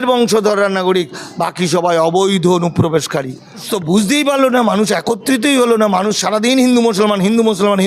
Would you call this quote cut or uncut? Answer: cut